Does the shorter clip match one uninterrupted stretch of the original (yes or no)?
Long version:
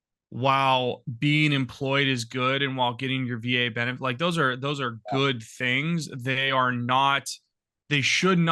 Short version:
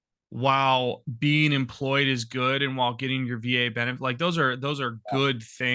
yes